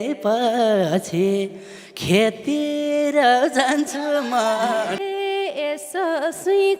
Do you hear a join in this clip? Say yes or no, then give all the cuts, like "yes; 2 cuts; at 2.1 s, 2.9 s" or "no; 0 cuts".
no; 0 cuts